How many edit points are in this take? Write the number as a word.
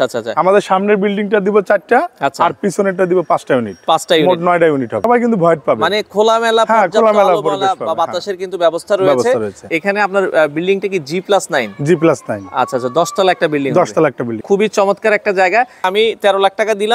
four